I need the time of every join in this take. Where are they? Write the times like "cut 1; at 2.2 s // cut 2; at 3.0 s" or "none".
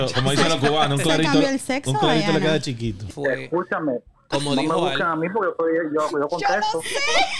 cut 1; at 3.1 s